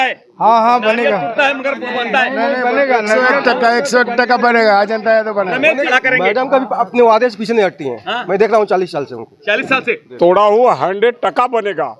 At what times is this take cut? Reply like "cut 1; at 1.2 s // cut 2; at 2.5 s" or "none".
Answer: cut 1; at 5.9 s // cut 2; at 10.1 s